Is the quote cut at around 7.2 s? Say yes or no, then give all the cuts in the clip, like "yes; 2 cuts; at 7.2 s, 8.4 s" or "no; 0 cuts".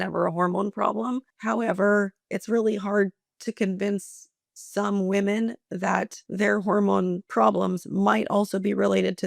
yes; 3 cuts; at 1.3 s, 6.2 s, 7.2 s